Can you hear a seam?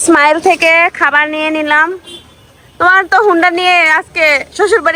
no; 0 cuts

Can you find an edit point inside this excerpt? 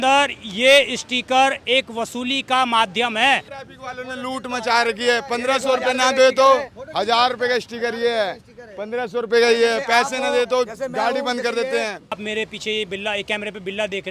yes; 2 cuts; at 3.6 s, 12.2 s

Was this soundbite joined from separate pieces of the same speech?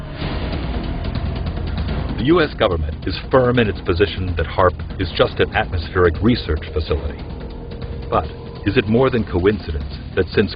yes; 1 cut; at 2.3 s

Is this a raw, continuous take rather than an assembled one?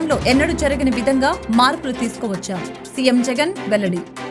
yes; 0 cuts

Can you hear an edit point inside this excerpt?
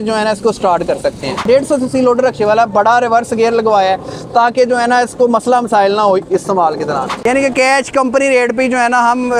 yes; 2 cuts; at 1.4 s, 7.1 s

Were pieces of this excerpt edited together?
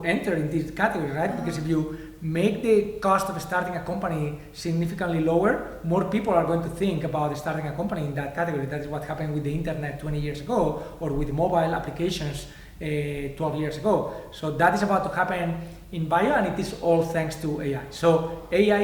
no; 0 cuts

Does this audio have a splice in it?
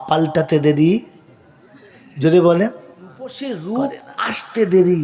yes; 1 cut; at 3.4 s

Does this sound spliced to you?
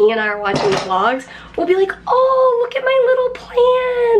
no; 0 cuts

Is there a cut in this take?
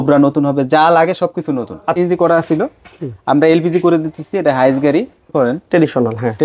yes; 2 cuts; at 2.0 s, 5.3 s

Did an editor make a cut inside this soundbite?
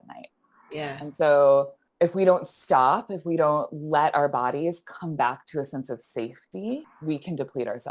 yes; 2 cuts; at 1.8 s, 6.9 s

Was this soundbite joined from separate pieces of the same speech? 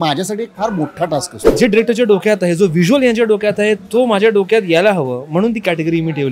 yes; 1 cut; at 1.4 s

